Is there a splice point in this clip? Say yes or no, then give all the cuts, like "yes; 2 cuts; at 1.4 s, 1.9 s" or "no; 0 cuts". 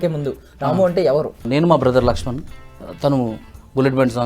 yes; 1 cut; at 1.4 s